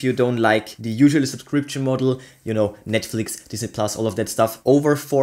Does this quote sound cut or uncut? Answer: uncut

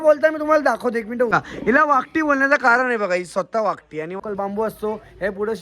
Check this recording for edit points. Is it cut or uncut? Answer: cut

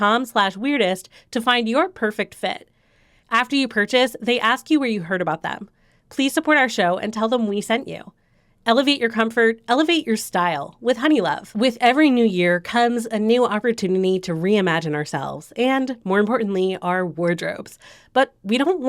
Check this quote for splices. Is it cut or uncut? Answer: cut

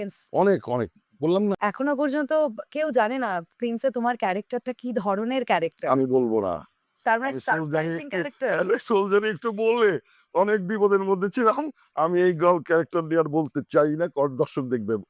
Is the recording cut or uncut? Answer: cut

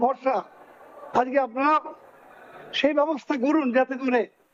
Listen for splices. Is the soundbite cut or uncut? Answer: uncut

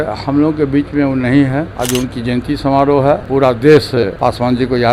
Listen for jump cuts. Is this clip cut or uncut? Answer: cut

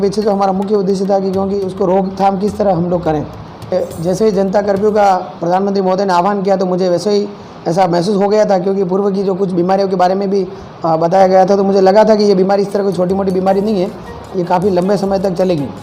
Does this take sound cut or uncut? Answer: cut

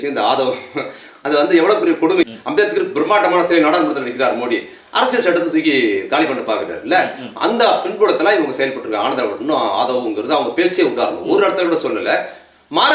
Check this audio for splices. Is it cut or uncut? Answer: cut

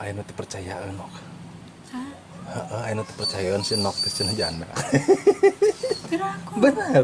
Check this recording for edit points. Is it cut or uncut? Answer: uncut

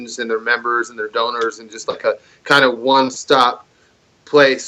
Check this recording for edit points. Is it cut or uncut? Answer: cut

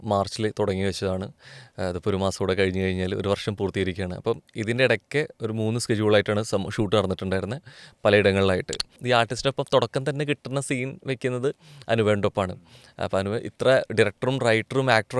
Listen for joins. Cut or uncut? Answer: cut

